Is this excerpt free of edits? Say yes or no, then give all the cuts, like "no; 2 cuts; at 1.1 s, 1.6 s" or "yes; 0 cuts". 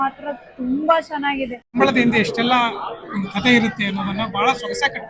no; 1 cut; at 1.8 s